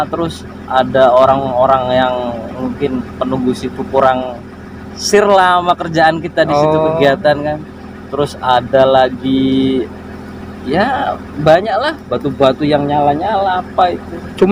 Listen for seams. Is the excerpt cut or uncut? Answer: uncut